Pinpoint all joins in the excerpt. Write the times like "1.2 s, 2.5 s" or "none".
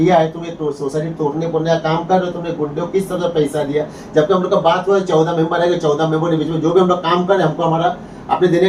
none